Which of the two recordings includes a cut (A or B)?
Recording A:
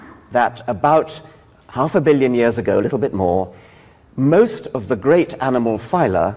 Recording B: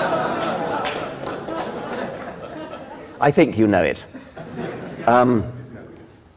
B